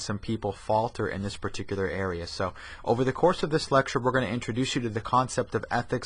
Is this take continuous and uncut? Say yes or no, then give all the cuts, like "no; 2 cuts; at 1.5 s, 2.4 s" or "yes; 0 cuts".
no; 1 cut; at 4.3 s